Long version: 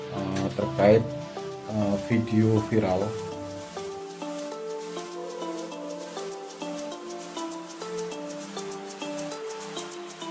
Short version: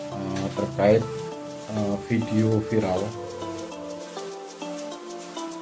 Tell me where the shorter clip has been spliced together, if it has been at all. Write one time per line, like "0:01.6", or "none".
0:03.1